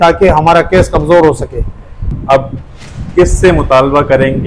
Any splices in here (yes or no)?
no